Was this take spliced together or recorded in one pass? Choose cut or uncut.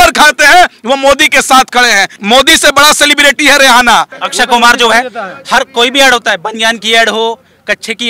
cut